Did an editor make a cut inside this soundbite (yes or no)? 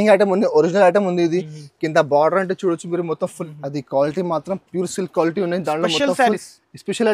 yes